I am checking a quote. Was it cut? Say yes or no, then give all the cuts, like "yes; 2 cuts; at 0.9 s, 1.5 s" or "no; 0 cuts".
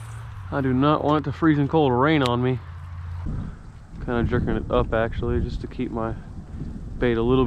yes; 1 cut; at 3.1 s